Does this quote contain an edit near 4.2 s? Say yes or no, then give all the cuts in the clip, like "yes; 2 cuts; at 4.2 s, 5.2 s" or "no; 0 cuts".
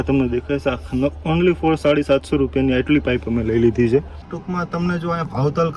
yes; 1 cut; at 4.2 s